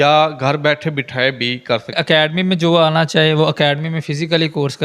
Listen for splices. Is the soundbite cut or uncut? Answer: cut